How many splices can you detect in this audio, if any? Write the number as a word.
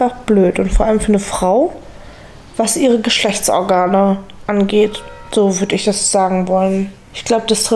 zero